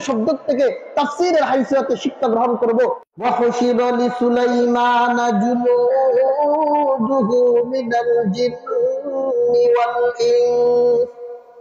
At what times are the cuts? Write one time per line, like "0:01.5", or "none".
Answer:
0:03.1